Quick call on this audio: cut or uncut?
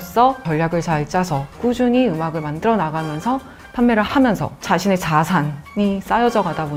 uncut